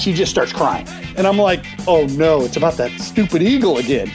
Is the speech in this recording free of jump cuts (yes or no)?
no